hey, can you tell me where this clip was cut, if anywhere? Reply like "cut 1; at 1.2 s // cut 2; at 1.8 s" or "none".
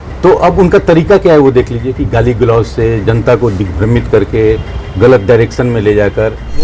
none